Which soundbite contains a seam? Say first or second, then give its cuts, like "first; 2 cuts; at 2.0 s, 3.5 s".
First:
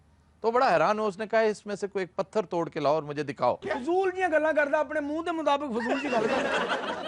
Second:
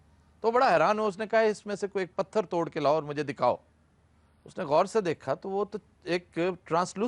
first; 1 cut; at 3.6 s